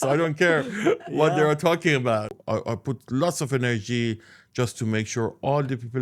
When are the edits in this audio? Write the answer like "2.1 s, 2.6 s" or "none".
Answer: 2.4 s